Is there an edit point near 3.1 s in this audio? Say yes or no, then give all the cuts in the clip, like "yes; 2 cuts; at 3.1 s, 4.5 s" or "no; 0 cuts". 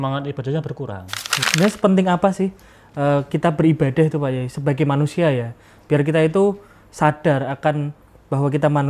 no; 1 cut; at 1.5 s